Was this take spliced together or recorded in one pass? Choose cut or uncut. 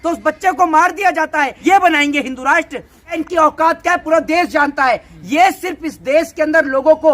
cut